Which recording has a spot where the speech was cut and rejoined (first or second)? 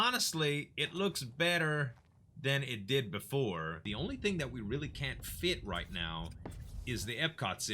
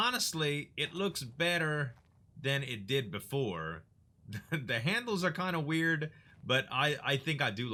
first